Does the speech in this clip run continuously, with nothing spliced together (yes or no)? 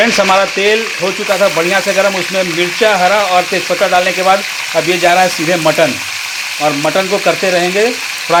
yes